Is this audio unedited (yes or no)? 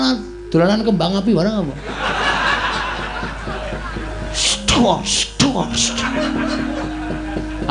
yes